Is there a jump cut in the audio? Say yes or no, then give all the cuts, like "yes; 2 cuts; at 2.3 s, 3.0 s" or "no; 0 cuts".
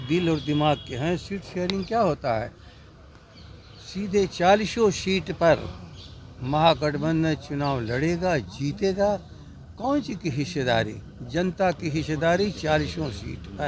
no; 0 cuts